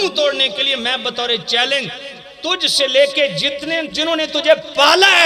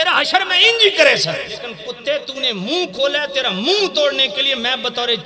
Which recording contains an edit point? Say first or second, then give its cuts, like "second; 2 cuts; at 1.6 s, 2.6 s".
second; 1 cut; at 1.8 s